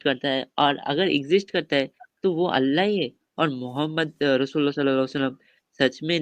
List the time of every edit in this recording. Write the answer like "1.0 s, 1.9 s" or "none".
none